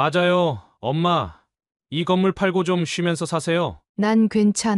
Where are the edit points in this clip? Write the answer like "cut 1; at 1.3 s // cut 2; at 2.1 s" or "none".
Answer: cut 1; at 3.8 s